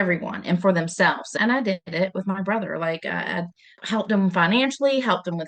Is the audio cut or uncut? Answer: cut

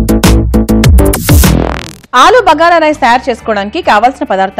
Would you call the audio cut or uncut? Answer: cut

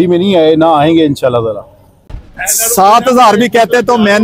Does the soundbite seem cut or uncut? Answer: cut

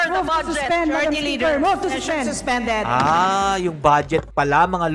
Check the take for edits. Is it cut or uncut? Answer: uncut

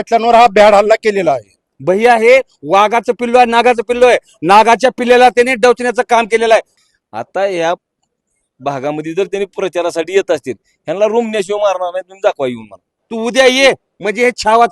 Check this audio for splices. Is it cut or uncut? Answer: cut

